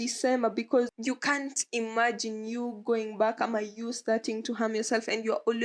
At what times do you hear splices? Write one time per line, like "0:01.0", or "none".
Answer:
0:00.9

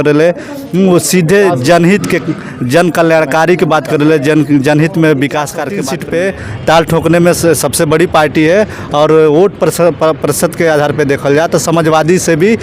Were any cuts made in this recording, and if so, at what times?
0:05.8

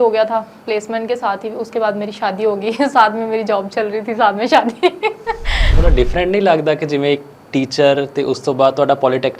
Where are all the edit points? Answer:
0:05.7

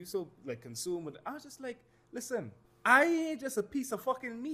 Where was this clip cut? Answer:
0:02.6

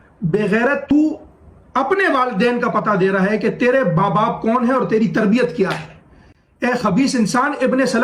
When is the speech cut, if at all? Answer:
0:00.9

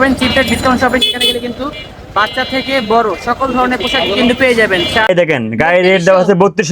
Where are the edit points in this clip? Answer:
0:05.1

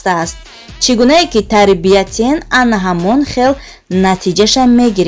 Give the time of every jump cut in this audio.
none

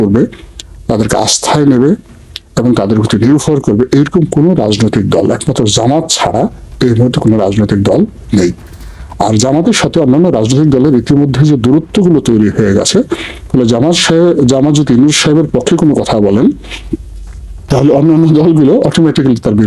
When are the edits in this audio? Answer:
none

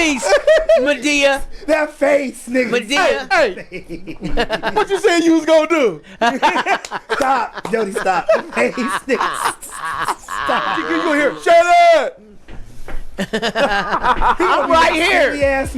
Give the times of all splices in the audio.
0:10.9

